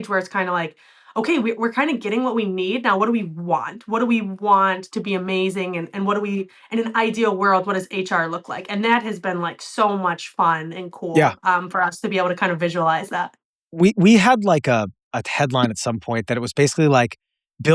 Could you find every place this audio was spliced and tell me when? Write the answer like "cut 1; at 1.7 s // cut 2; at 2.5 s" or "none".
none